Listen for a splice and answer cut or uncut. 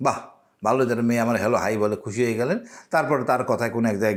uncut